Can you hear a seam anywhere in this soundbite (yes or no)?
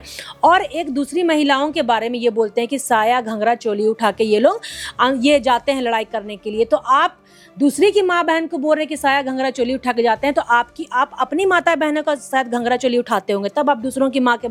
no